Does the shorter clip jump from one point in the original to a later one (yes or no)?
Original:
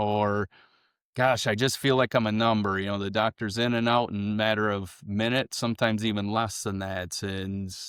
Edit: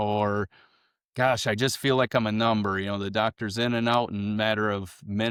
no